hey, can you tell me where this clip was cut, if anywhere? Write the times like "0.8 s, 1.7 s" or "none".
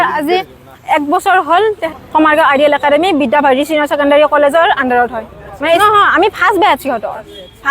2.0 s, 5.8 s